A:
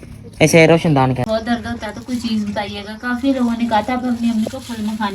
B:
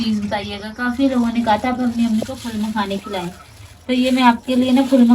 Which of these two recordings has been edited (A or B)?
A